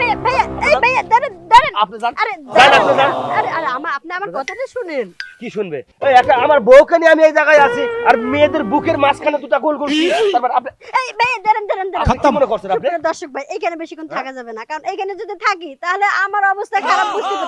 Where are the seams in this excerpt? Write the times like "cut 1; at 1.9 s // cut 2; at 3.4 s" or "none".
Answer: none